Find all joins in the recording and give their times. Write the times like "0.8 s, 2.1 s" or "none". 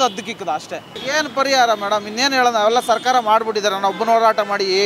1.0 s